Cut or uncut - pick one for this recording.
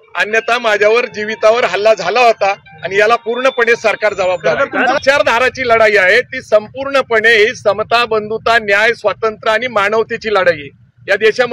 cut